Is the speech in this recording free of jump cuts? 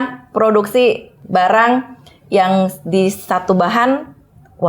no; 1 cut; at 1.1 s

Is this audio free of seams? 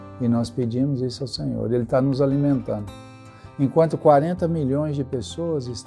yes; 0 cuts

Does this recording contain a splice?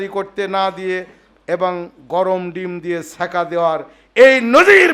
no; 0 cuts

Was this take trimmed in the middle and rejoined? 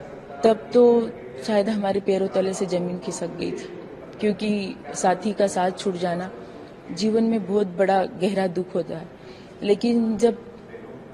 no; 0 cuts

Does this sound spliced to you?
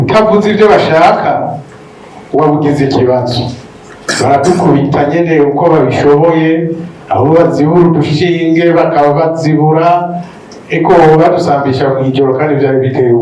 no; 0 cuts

